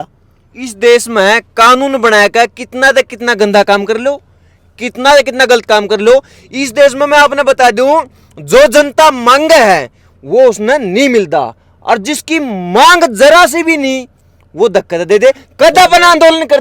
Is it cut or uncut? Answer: uncut